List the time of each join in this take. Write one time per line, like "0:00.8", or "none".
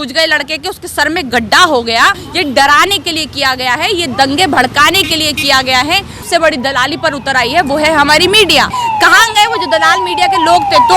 0:02.3
0:06.2
0:08.7